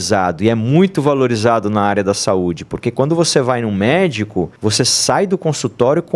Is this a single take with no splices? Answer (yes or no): no